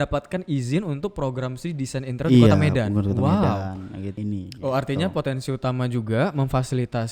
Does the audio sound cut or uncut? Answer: cut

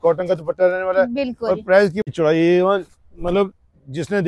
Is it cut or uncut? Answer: cut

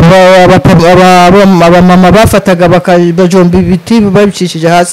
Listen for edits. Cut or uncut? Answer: uncut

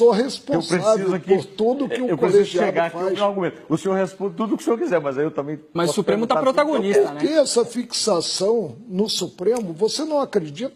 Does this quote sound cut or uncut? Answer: uncut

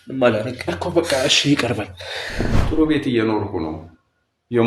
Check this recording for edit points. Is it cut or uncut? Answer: cut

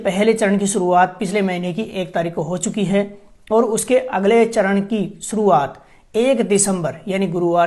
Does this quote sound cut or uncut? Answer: uncut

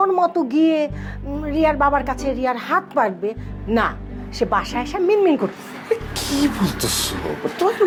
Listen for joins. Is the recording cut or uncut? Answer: uncut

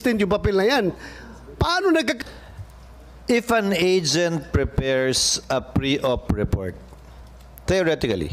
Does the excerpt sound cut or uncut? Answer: cut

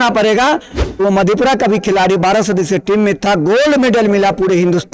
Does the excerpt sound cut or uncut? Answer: cut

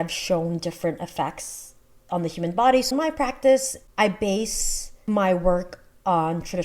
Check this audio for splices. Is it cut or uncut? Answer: cut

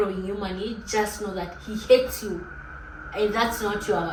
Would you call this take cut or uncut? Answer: uncut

